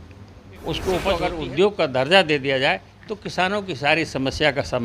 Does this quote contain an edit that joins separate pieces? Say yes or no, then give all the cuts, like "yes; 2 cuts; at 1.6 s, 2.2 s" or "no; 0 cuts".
yes; 1 cut; at 1.3 s